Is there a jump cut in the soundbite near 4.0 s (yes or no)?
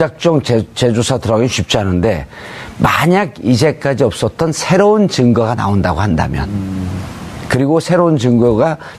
yes